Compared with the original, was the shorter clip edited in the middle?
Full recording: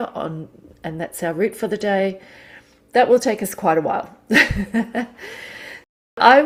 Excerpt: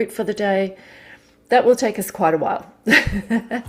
no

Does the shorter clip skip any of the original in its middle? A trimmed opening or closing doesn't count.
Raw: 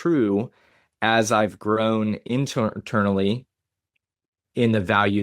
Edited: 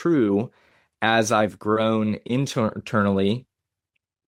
no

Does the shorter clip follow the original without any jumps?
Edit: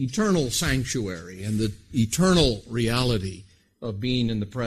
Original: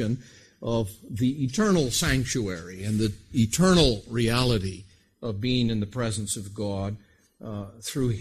yes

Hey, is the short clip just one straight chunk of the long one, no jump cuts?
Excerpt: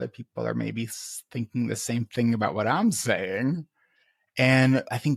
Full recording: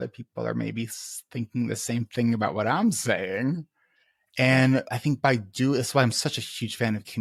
yes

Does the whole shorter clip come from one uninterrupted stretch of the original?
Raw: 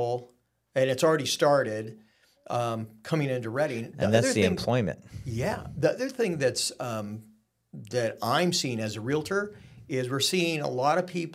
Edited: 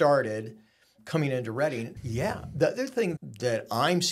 no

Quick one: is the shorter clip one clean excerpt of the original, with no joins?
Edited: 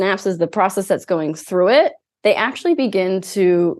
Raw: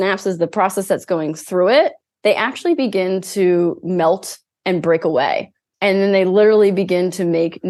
yes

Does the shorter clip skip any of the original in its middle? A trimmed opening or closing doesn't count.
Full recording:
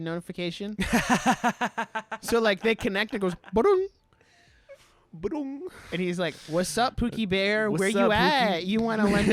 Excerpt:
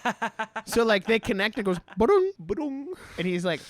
yes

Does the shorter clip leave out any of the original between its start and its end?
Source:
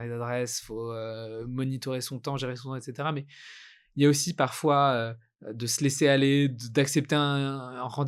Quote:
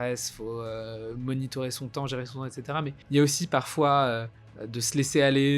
yes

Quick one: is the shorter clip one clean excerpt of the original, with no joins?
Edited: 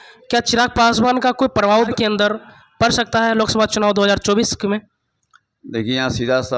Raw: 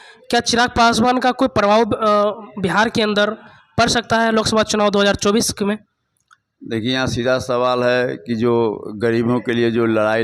no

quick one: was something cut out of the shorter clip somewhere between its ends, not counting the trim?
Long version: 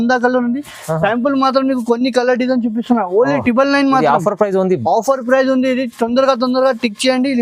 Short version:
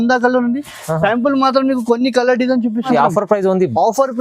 yes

